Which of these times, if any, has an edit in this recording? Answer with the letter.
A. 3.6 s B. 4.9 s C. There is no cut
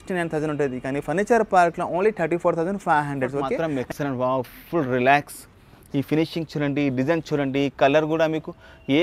A